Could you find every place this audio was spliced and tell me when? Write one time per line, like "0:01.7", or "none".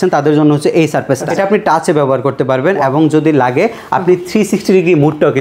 0:01.3